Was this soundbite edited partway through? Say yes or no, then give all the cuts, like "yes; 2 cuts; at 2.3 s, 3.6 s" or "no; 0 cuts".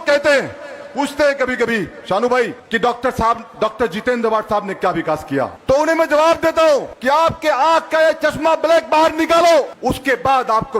yes; 4 cuts; at 2.6 s, 5.6 s, 6.9 s, 9.7 s